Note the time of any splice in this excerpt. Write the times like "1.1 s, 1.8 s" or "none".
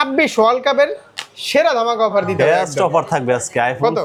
none

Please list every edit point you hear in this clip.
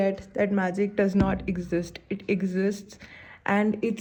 none

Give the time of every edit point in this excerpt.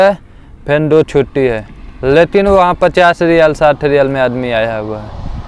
none

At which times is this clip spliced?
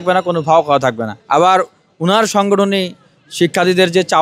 1.1 s

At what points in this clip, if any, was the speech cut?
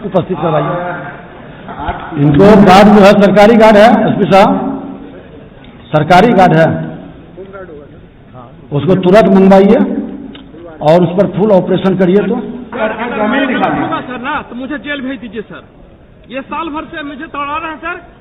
1.7 s, 12.7 s

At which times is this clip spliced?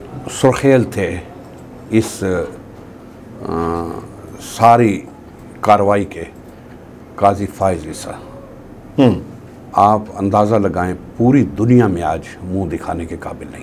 none

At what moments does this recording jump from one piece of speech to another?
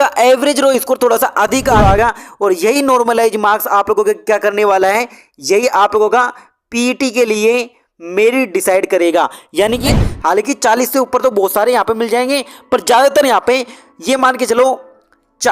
1.8 s, 9.9 s

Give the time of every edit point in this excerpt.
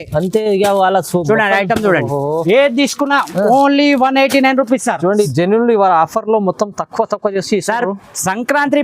5.3 s

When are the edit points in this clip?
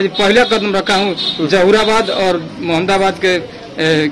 none

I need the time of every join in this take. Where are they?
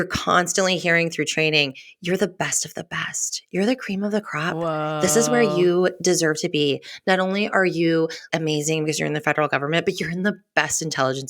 none

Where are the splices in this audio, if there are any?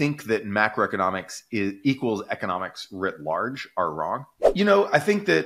4.4 s

